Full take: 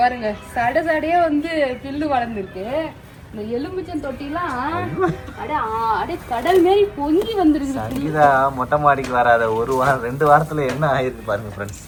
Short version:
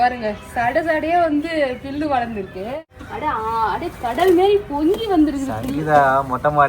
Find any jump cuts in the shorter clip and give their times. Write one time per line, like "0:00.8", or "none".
0:03.0